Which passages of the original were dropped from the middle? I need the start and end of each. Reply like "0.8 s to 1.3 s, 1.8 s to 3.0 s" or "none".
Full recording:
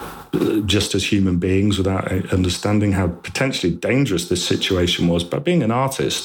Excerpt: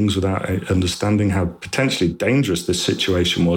none